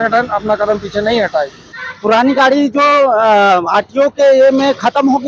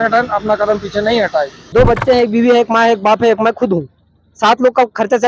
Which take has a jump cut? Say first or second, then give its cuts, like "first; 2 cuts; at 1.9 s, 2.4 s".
second; 1 cut; at 1.6 s